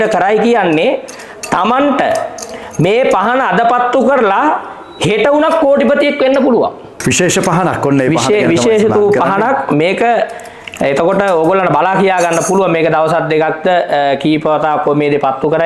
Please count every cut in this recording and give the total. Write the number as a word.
one